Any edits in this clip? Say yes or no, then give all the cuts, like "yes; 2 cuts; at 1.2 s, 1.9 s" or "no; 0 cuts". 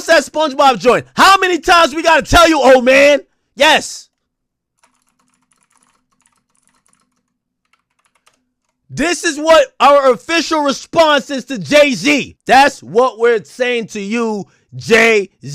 no; 0 cuts